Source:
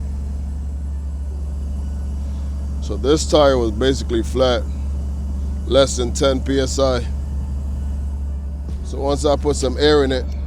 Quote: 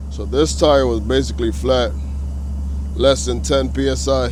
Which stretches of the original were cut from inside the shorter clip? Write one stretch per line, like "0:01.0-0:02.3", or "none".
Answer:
none